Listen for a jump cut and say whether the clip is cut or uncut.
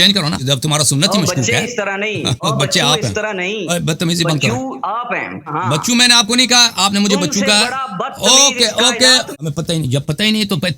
cut